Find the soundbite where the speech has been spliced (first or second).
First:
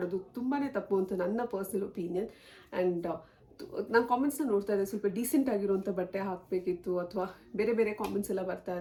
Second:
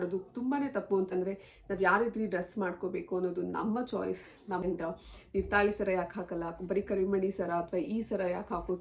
second